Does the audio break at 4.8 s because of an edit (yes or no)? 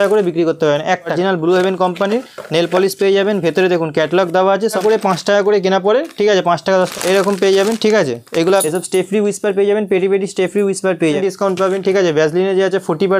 yes